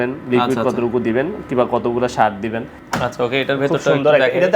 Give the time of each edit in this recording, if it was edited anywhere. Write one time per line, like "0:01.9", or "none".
0:02.7